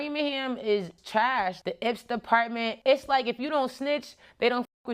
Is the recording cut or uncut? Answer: cut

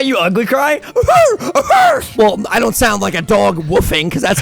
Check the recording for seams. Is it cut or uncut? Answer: cut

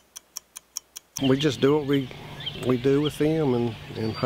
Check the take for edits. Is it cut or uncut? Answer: cut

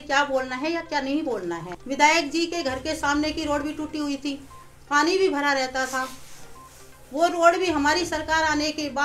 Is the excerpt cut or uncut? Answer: cut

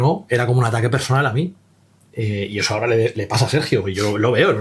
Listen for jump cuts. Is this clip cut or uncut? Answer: uncut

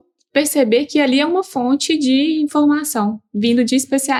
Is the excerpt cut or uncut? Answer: uncut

